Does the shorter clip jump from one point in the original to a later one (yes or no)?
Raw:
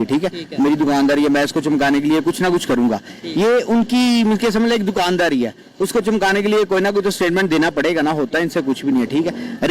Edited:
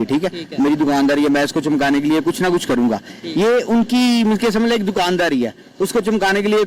no